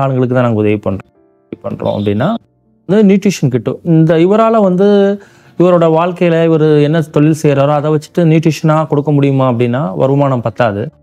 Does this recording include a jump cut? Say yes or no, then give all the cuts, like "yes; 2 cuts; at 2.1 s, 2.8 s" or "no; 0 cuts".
no; 0 cuts